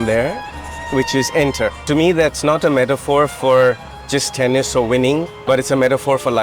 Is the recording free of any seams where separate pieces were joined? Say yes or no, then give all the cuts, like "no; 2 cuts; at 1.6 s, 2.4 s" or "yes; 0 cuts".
no; 2 cuts; at 1.8 s, 5.3 s